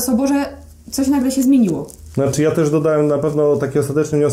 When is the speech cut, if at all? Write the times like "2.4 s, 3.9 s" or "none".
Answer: none